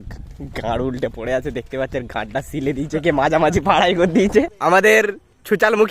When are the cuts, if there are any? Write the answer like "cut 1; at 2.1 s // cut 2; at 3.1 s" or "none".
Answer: cut 1; at 4.5 s

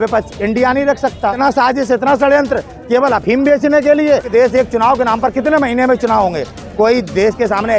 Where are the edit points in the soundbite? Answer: cut 1; at 1.4 s // cut 2; at 4.3 s

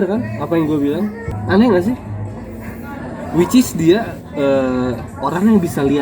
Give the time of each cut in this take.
cut 1; at 1.3 s

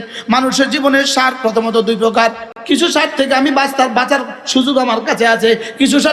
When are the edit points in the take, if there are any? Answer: cut 1; at 2.5 s

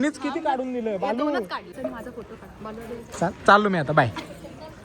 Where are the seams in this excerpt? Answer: cut 1; at 1.7 s

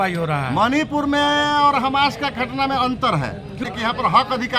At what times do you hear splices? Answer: cut 1; at 3.6 s

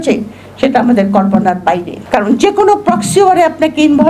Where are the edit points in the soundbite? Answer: cut 1; at 1.9 s

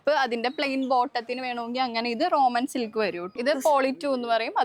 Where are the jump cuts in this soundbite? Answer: cut 1; at 3.3 s

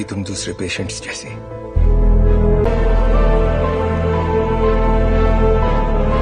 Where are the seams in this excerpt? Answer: cut 1; at 2.7 s

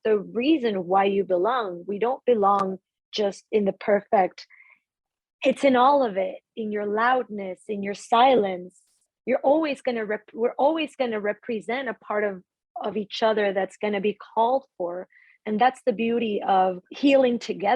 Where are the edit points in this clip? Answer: cut 1; at 4.6 s // cut 2; at 16.9 s

